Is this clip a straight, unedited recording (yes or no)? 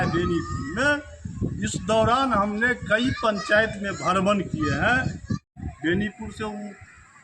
no